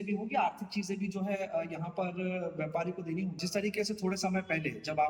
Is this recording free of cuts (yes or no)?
no